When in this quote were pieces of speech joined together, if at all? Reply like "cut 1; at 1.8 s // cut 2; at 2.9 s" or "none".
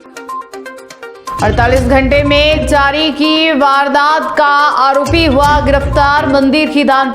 cut 1; at 1.0 s